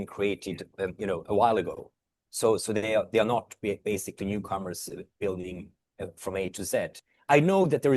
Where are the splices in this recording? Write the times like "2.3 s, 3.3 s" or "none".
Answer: 7.0 s